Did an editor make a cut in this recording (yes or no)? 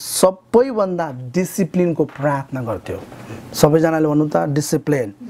no